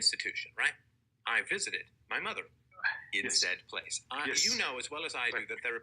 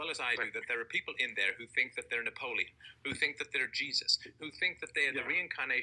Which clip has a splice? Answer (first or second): first